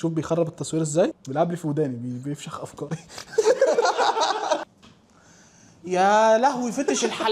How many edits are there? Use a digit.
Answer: 2